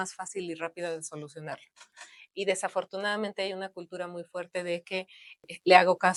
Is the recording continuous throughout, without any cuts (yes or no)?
yes